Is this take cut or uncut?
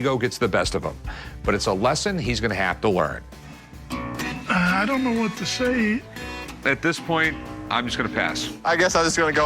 cut